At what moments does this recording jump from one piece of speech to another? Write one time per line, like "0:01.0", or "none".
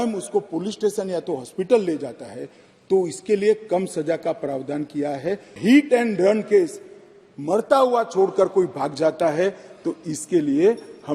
0:05.6